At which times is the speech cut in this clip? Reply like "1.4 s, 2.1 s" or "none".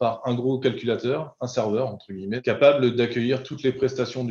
2.4 s